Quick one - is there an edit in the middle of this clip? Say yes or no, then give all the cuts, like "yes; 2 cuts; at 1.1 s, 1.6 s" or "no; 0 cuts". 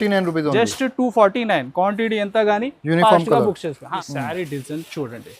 yes; 1 cut; at 4.0 s